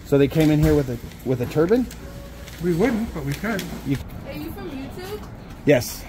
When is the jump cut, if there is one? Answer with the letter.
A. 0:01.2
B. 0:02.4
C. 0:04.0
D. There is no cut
C